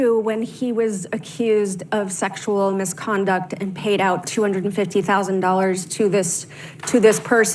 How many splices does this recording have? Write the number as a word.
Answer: zero